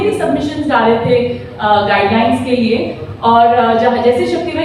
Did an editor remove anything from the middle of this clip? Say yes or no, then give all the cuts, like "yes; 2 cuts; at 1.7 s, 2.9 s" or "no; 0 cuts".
no; 0 cuts